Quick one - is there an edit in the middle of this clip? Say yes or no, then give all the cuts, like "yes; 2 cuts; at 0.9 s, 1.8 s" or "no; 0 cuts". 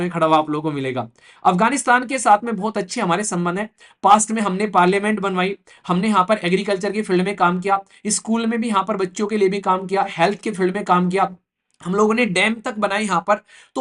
no; 0 cuts